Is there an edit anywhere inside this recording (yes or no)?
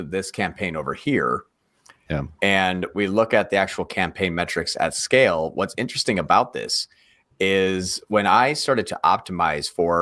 no